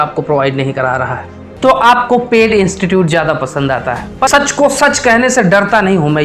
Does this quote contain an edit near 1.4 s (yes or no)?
yes